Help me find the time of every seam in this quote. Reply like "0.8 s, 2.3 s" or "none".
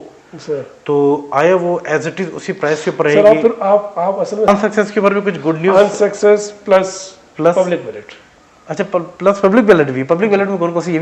4.5 s